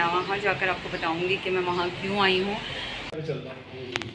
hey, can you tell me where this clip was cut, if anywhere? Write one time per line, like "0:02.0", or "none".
0:03.1

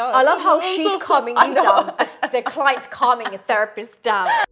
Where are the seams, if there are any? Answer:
none

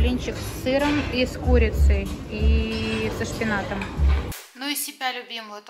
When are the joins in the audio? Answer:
0:04.3

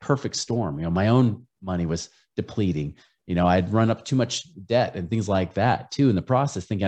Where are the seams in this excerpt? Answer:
none

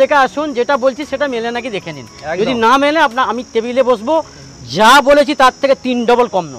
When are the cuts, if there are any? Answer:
none

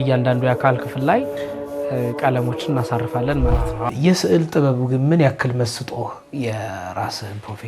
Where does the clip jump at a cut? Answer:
0:03.9

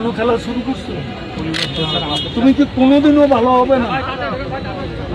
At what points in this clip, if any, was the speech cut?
none

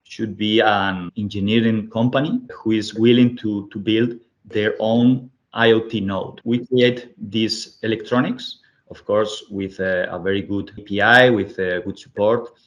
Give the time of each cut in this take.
0:01.1
0:02.5
0:06.4
0:10.8

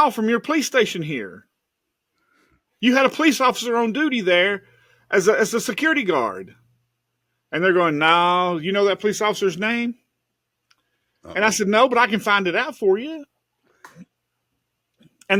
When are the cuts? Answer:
none

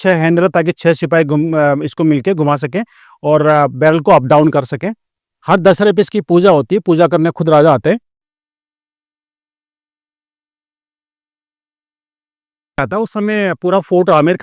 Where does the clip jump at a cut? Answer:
none

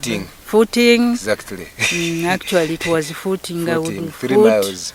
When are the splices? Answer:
none

